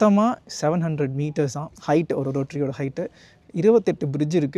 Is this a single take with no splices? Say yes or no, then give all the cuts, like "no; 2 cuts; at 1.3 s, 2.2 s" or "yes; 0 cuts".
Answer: yes; 0 cuts